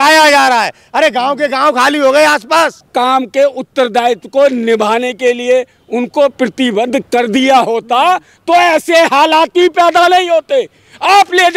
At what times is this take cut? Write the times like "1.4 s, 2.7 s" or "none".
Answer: 2.8 s